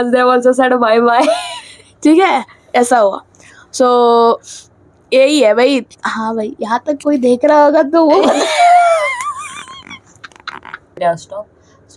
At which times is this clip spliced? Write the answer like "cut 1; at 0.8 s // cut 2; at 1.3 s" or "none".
cut 1; at 11.0 s